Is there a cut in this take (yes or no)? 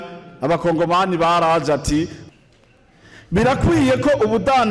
yes